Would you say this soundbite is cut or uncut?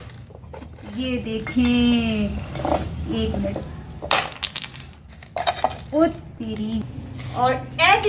cut